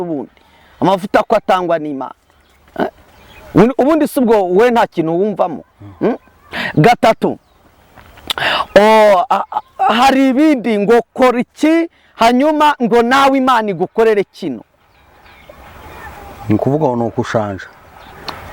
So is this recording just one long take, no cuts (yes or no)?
yes